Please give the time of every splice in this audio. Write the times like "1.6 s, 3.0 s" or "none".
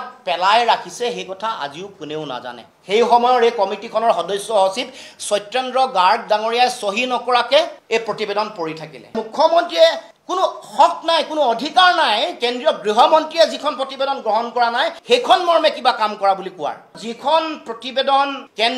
2.7 s, 9.2 s, 16.9 s